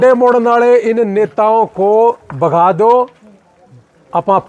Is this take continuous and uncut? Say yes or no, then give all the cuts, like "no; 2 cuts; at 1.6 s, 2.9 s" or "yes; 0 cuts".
yes; 0 cuts